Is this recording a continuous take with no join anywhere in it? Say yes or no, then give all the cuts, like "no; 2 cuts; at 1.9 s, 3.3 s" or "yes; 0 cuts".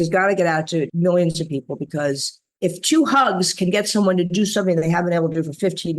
no; 1 cut; at 0.9 s